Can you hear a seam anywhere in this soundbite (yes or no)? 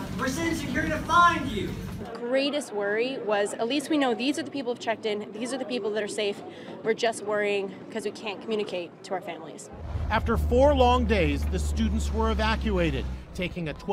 yes